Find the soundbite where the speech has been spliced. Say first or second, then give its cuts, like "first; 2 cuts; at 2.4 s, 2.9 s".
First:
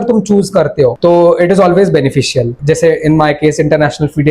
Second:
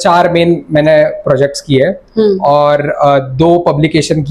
first; 2 cuts; at 1.0 s, 2.6 s